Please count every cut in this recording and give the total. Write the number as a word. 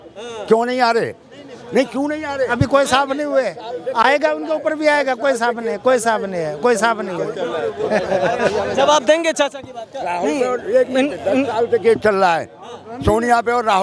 zero